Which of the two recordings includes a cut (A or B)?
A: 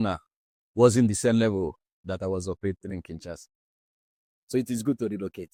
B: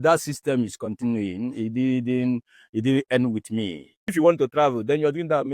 B